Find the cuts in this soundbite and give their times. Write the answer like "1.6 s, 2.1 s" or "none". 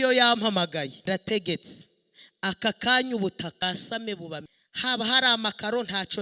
1.0 s, 3.6 s, 4.6 s